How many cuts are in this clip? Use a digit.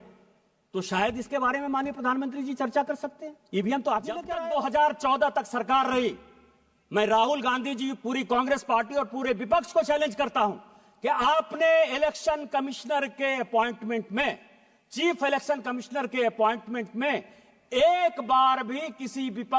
1